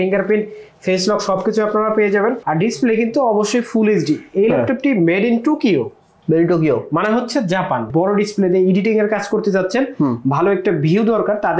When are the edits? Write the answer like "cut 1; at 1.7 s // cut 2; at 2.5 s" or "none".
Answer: cut 1; at 2.4 s // cut 2; at 7.9 s